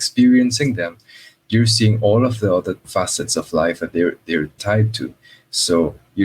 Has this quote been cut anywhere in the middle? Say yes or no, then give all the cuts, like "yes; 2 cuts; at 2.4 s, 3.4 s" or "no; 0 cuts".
yes; 2 cuts; at 2.8 s, 4.6 s